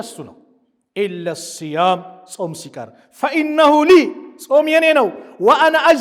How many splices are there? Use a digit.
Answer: 0